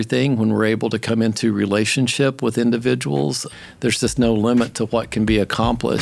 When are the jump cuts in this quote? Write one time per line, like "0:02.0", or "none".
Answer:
0:03.5